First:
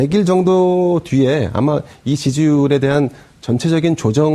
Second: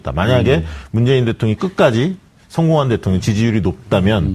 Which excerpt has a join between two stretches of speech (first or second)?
first